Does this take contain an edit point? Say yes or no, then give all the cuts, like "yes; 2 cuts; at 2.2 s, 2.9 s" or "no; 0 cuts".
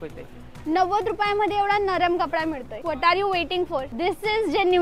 yes; 2 cuts; at 2.7 s, 3.9 s